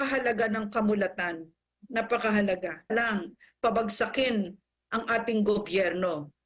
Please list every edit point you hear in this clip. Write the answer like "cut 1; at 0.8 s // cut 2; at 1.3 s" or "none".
cut 1; at 2.9 s